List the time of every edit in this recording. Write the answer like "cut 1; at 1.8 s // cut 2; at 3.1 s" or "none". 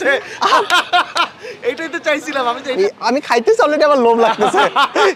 cut 1; at 2.8 s